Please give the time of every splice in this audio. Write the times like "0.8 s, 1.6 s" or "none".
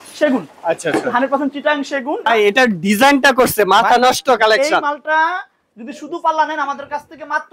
2.3 s